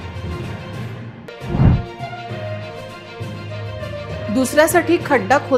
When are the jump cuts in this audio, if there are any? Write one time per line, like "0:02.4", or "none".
none